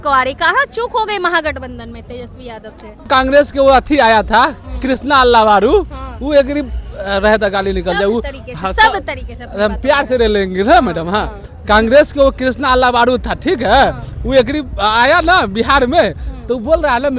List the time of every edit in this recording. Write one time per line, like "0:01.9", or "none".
0:03.1